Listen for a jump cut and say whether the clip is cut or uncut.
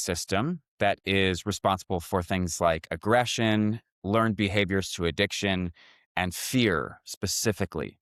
uncut